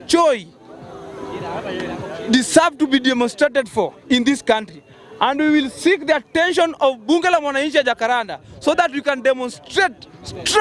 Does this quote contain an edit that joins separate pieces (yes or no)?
no